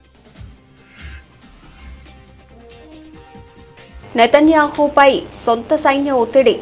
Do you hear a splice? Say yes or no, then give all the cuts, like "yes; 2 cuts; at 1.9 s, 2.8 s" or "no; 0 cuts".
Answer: no; 0 cuts